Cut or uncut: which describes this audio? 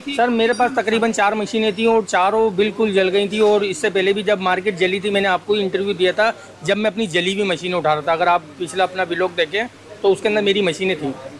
uncut